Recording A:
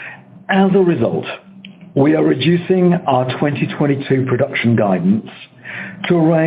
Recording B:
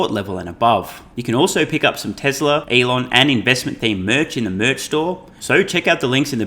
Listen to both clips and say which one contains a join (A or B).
B